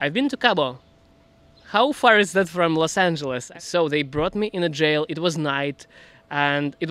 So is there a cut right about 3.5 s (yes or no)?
yes